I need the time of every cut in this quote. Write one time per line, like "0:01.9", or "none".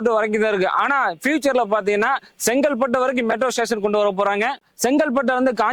0:04.8